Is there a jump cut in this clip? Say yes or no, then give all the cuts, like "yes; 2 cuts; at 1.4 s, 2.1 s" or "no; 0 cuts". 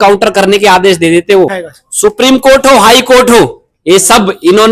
yes; 1 cut; at 1.6 s